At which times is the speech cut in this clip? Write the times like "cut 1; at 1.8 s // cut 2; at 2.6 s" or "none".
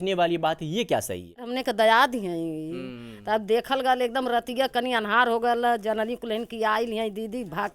cut 1; at 1.5 s

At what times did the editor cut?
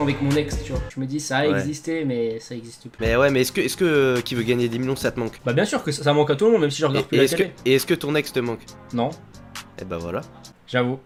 none

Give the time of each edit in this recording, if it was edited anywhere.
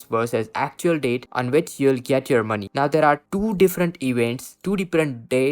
cut 1; at 2.7 s

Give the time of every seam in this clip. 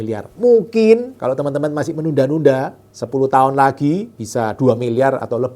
cut 1; at 1.1 s // cut 2; at 4.2 s

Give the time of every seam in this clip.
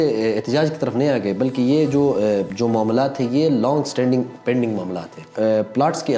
cut 1; at 2.5 s // cut 2; at 5.3 s

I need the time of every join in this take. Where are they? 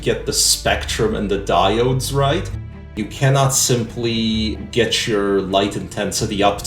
cut 1; at 2.9 s // cut 2; at 4.6 s

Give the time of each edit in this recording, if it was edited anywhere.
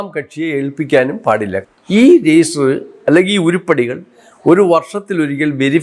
cut 1; at 1.6 s

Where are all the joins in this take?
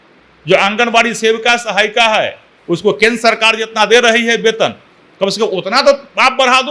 none

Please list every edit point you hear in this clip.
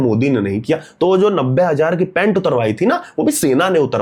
none

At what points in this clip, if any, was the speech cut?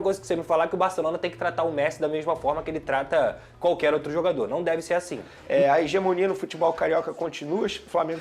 cut 1; at 5.3 s

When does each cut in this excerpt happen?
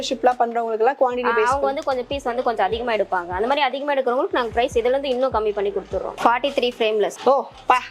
cut 1; at 6.1 s

